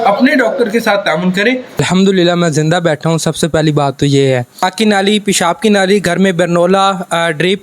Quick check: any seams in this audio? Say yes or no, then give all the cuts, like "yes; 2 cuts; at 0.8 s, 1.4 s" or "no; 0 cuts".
yes; 2 cuts; at 1.8 s, 4.7 s